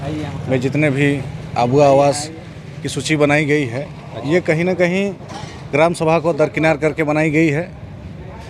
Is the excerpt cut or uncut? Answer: uncut